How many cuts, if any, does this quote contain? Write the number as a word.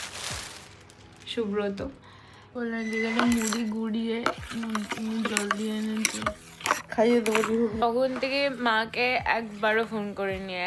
three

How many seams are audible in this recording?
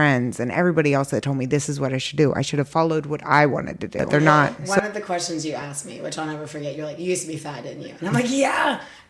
one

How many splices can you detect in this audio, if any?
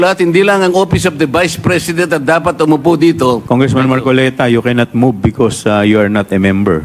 one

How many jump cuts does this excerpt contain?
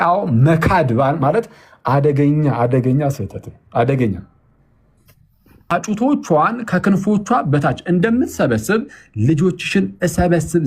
one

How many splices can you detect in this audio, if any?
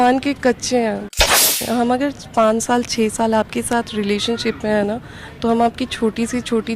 one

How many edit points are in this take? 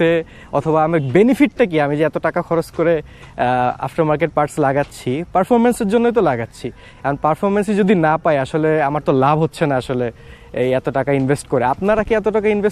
zero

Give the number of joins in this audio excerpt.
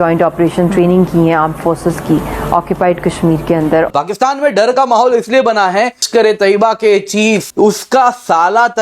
three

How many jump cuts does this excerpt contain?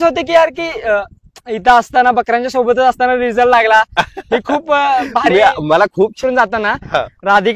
one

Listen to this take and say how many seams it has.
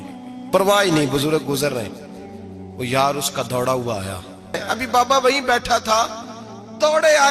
one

